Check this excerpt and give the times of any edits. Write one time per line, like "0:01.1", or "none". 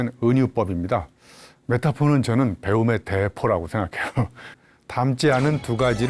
0:04.6